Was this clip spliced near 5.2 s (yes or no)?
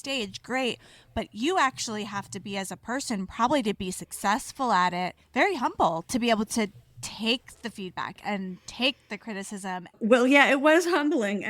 yes